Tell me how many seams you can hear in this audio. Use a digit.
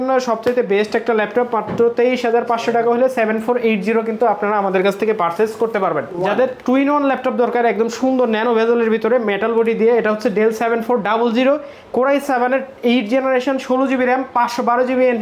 1